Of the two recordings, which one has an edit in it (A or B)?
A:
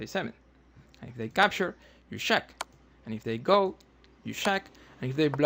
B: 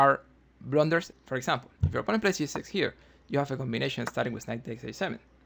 B